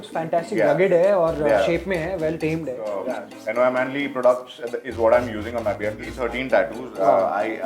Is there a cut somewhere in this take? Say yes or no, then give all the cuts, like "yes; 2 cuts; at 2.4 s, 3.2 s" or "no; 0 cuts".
yes; 2 cuts; at 3.0 s, 6.1 s